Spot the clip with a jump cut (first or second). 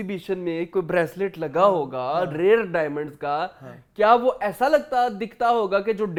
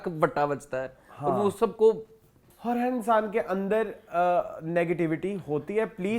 second